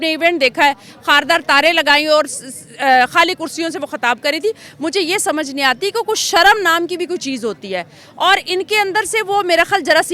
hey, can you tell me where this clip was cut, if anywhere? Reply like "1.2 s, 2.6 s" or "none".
none